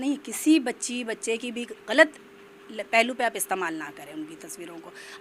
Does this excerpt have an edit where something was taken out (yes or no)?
no